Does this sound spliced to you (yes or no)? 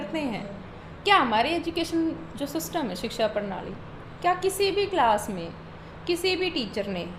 no